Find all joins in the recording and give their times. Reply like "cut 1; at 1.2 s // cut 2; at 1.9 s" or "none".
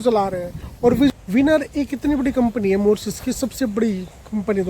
cut 1; at 1.1 s